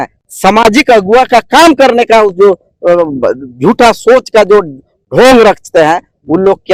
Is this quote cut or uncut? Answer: uncut